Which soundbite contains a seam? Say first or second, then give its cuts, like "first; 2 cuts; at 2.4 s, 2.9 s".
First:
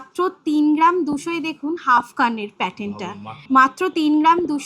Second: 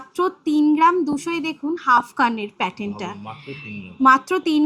first; 1 cut; at 3.4 s